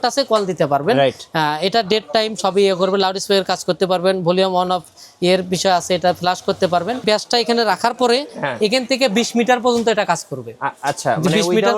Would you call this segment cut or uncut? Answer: cut